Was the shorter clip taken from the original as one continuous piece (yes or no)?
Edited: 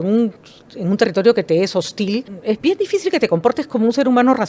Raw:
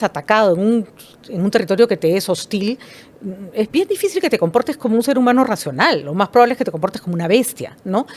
no